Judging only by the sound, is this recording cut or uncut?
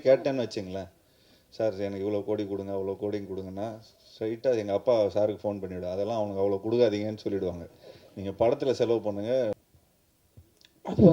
cut